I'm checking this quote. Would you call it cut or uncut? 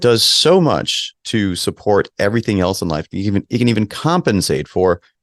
uncut